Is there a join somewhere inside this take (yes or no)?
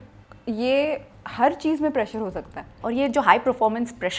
yes